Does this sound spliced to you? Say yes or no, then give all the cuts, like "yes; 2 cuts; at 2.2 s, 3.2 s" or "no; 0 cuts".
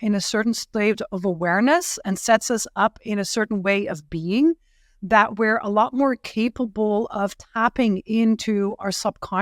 no; 0 cuts